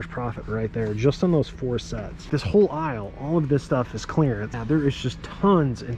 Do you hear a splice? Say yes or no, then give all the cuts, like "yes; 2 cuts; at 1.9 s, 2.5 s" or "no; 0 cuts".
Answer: yes; 2 cuts; at 2.3 s, 4.6 s